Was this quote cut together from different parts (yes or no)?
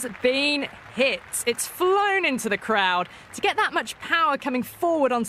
no